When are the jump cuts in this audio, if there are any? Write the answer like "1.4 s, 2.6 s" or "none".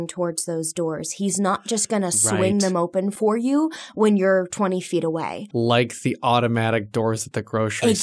3.1 s, 5.4 s